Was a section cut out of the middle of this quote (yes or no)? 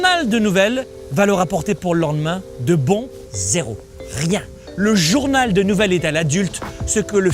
yes